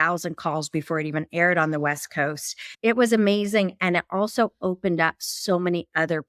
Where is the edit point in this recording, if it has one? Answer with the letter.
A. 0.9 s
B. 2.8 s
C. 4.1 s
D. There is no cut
B